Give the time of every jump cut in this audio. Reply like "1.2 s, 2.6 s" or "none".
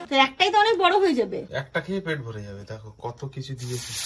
1.5 s

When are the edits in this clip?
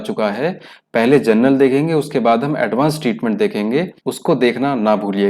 4.0 s

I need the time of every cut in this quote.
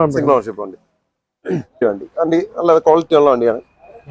1.8 s

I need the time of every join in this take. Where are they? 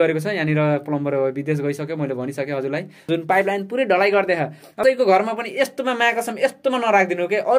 3.1 s, 4.8 s

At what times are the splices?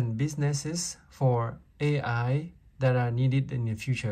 none

